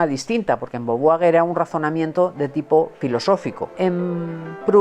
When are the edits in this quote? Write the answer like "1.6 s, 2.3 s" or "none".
3.5 s